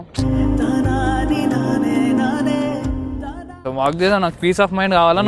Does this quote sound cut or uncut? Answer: cut